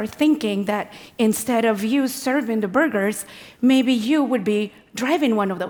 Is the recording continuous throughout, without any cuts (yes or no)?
yes